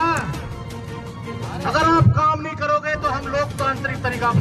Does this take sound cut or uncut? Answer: uncut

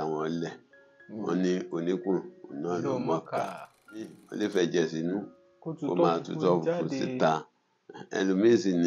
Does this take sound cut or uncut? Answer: cut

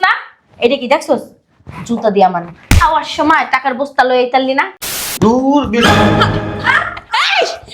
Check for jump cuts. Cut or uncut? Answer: cut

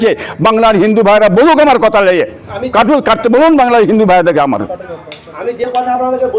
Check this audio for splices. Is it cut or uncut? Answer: uncut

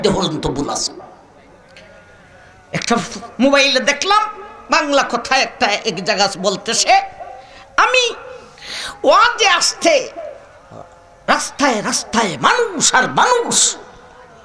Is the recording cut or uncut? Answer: uncut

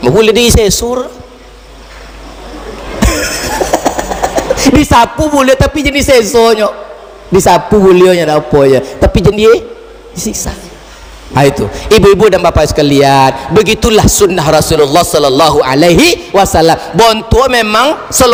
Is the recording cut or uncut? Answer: uncut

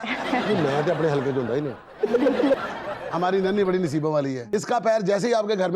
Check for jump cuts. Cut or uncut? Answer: cut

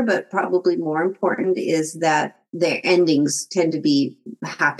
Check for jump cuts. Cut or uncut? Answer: cut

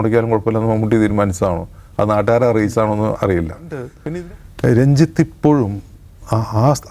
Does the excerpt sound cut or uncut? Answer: cut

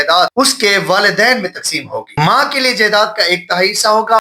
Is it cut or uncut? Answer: uncut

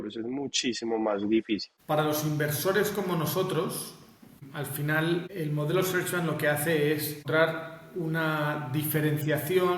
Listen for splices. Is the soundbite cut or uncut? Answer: cut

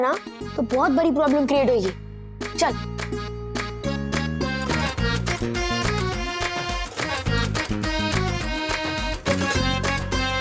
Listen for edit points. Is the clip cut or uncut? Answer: uncut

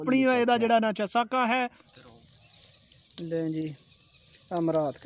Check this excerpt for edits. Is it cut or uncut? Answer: cut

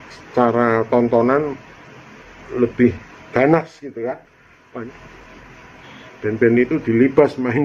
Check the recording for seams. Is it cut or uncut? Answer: cut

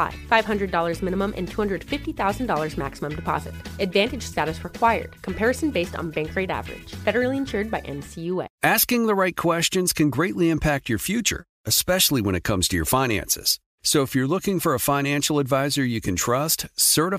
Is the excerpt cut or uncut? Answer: cut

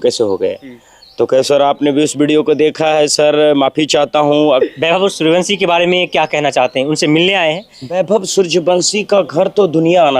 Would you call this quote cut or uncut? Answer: cut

